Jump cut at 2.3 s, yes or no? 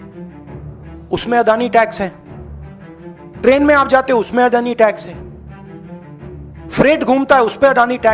no